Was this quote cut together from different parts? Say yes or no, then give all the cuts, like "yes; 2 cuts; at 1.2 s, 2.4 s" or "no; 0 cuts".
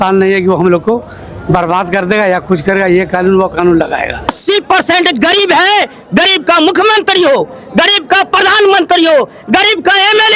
yes; 1 cut; at 4.3 s